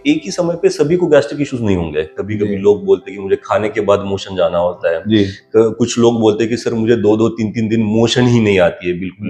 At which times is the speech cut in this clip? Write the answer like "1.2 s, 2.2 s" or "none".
2.2 s